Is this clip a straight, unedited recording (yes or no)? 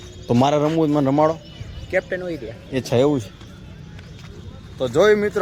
yes